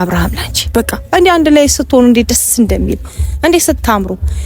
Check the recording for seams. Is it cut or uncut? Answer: uncut